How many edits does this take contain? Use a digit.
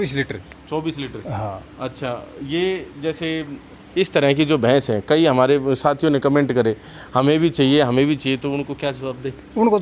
0